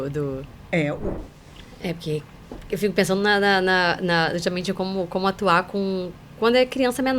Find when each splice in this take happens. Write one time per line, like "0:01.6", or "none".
0:01.2